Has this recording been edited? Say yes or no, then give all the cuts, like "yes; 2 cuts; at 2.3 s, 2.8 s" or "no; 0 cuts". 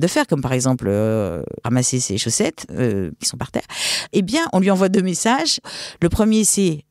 yes; 3 cuts; at 1.6 s, 3.2 s, 5.7 s